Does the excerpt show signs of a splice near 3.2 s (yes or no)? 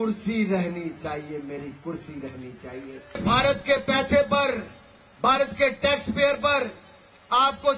yes